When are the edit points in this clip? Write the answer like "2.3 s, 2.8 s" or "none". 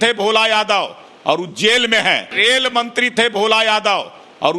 none